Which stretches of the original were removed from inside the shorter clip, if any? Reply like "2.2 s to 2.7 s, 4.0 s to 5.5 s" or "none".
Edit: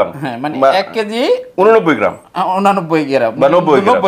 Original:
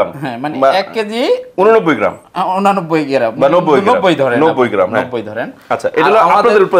none